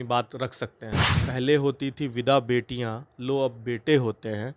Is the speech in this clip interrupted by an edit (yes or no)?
yes